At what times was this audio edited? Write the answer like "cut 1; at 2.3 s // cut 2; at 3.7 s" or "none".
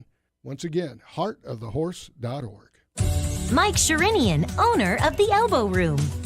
cut 1; at 2.8 s